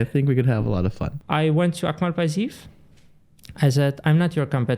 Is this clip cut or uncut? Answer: cut